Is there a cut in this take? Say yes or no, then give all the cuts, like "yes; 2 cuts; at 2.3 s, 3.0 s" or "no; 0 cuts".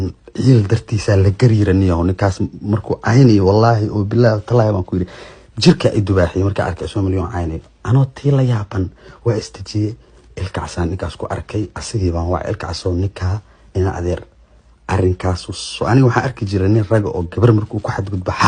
no; 0 cuts